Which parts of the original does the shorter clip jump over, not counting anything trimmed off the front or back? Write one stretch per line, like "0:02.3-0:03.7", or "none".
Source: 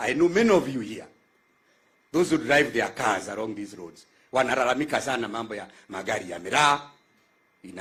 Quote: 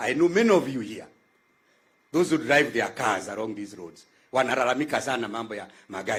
none